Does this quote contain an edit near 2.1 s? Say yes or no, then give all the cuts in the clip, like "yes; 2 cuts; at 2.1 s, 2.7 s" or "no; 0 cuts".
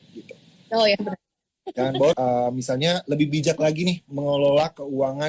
yes; 1 cut; at 2.1 s